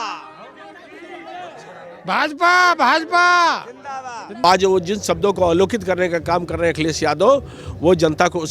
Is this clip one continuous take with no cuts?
no; 1 cut; at 4.4 s

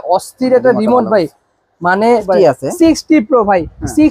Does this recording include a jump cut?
yes; 1 cut; at 2.2 s

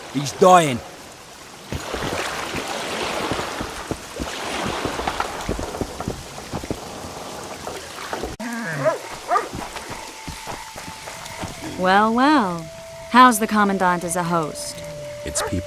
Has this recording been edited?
no; 0 cuts

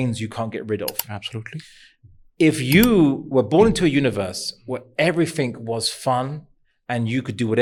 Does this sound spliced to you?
no; 0 cuts

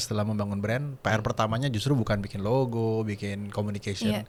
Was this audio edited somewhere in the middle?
no; 0 cuts

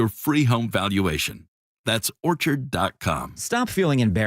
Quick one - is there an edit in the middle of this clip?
yes; 1 cut; at 3.3 s

